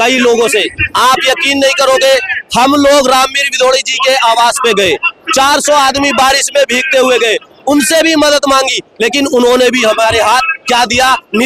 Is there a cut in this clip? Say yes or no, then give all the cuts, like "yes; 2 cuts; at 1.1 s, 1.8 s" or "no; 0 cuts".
no; 0 cuts